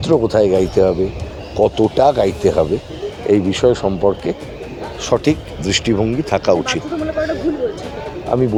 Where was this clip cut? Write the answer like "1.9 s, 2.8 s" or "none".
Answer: none